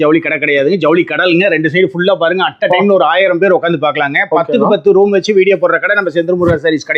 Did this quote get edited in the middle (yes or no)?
no